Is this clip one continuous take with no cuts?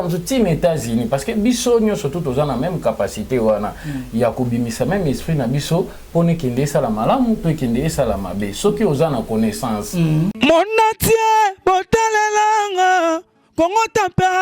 no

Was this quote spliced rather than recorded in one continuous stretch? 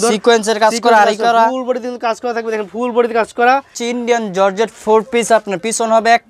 yes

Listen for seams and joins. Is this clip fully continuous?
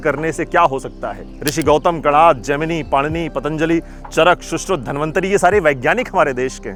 yes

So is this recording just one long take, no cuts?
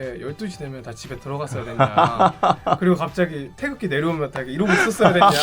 yes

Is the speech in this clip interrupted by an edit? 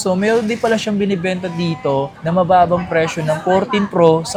no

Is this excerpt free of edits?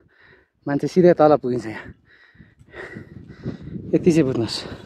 yes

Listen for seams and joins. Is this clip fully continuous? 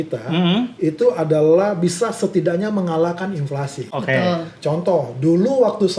yes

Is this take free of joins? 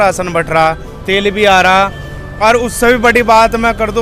yes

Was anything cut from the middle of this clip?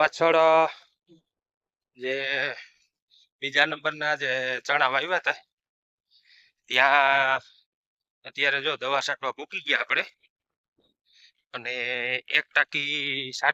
no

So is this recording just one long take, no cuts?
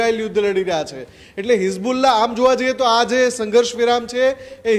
yes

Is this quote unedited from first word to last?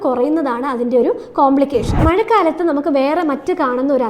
no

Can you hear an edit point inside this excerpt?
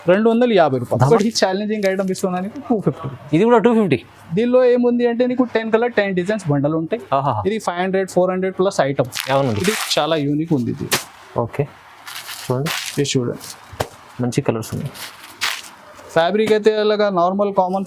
yes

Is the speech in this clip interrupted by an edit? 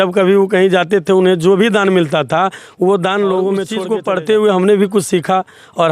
yes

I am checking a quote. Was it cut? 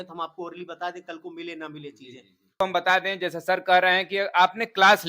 yes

